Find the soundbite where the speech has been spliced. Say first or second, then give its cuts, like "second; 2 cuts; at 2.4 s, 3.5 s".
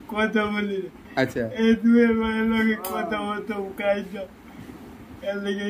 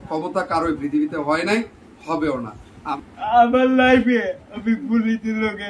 second; 1 cut; at 2.8 s